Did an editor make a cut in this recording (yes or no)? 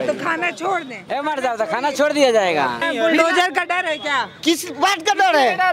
yes